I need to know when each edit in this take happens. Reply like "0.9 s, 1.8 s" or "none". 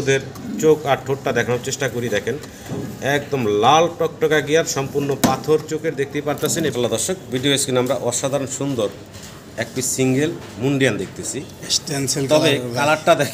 6.7 s